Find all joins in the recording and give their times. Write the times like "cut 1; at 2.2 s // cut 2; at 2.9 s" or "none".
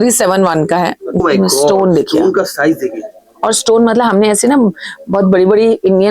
cut 1; at 1.2 s